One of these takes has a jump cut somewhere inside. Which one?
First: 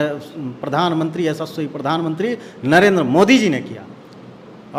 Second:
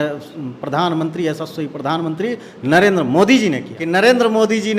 second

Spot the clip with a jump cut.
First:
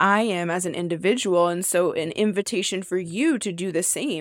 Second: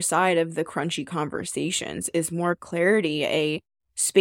second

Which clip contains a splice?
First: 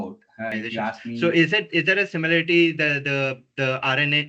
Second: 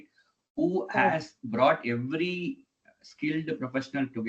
first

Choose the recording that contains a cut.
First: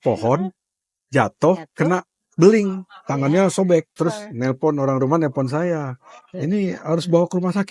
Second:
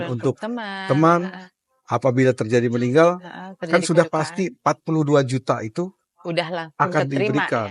first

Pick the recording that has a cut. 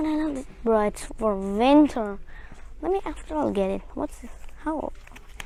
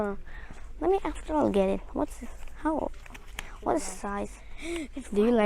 second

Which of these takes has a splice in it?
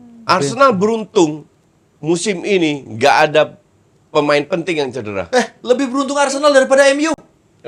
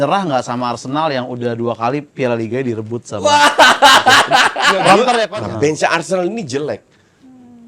second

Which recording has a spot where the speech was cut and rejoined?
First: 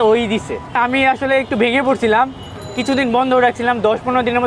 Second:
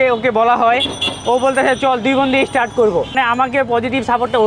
second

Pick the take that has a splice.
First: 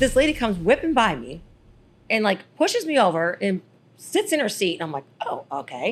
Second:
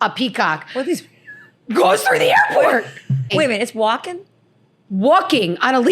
second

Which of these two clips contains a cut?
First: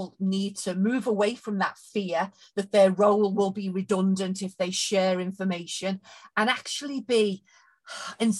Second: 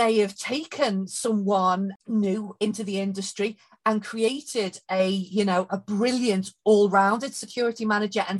second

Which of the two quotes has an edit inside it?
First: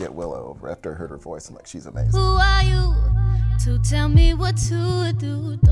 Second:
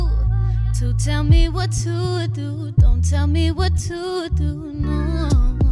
first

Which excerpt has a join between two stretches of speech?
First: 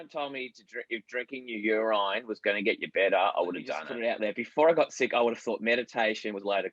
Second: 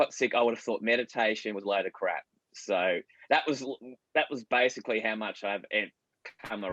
first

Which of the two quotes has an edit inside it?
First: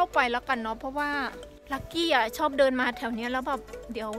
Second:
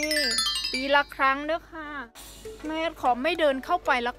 first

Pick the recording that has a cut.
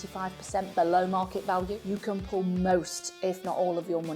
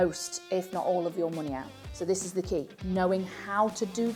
first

